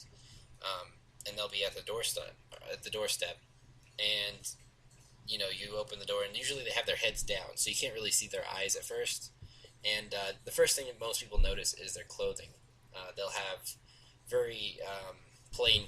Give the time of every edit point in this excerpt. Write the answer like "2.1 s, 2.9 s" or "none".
5.4 s